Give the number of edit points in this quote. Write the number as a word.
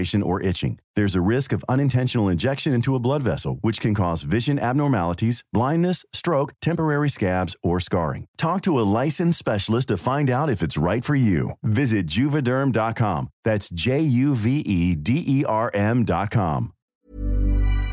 one